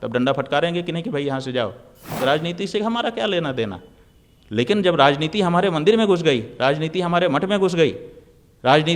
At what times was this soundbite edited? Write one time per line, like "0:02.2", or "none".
0:02.1